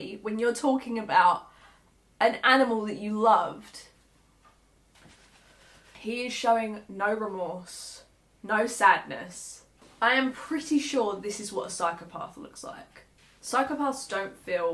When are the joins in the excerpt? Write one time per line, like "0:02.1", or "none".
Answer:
none